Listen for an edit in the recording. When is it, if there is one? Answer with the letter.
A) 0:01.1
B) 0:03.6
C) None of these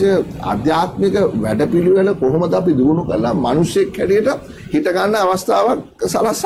C